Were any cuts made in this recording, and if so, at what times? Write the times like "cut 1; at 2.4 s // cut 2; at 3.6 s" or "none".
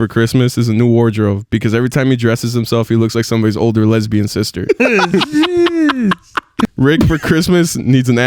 cut 1; at 6.7 s